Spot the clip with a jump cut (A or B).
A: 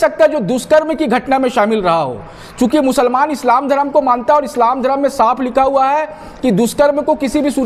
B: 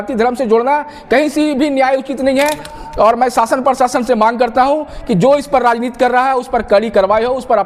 B